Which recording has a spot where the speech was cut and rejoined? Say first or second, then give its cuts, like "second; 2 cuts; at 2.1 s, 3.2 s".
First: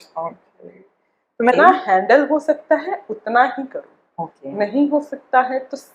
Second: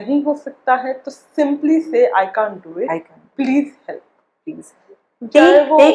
first; 1 cut; at 1.5 s